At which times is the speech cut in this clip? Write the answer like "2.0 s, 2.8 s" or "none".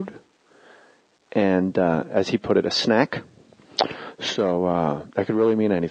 none

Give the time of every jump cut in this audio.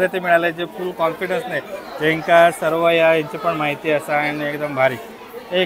none

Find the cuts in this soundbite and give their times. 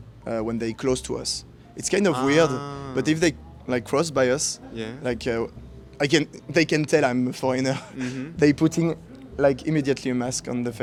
none

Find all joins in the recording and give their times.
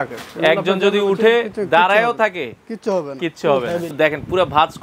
3.9 s

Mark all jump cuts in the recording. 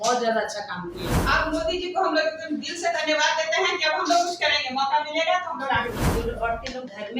1.1 s, 6.0 s

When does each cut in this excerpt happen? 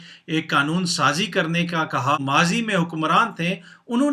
2.2 s

